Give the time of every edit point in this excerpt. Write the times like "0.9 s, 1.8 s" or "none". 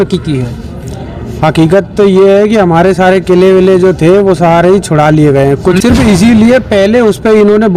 5.7 s

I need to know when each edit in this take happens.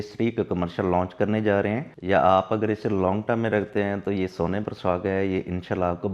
1.9 s

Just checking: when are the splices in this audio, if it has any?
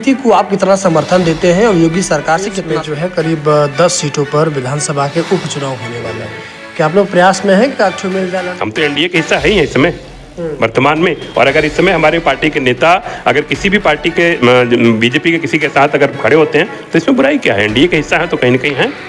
2.7 s, 8.4 s

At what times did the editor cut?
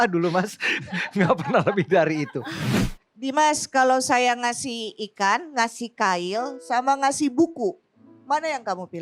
2.6 s

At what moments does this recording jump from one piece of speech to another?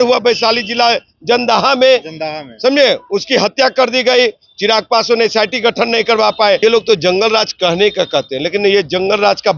6.6 s

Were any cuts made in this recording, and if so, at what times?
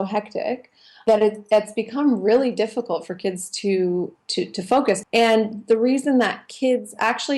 5.0 s

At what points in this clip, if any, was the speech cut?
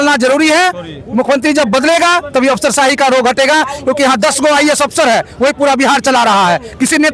none

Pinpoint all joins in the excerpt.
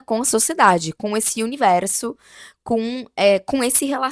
none

